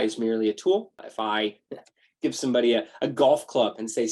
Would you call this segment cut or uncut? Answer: cut